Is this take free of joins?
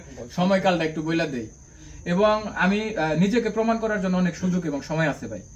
no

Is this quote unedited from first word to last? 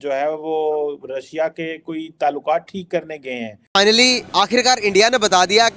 no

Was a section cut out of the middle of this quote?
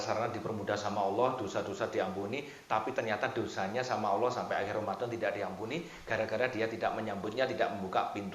no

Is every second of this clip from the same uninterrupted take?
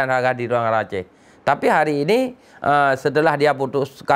yes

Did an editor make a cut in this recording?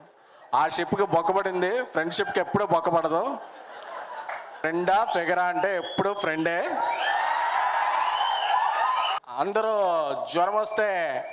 yes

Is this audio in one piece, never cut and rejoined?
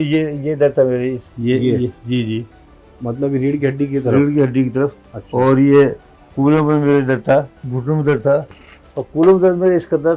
no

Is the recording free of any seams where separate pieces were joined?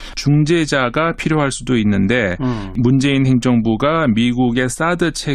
no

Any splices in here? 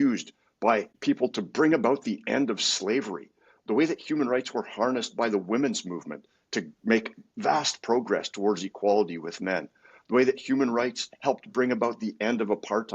yes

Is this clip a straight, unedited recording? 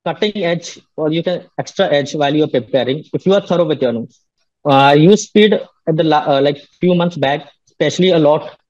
no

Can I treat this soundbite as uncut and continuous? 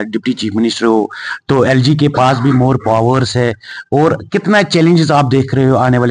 yes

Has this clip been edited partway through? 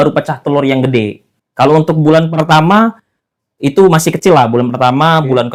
no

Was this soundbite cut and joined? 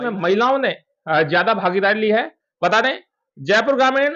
no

